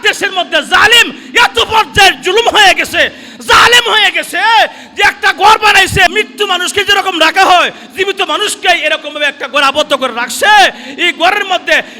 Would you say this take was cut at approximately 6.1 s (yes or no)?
yes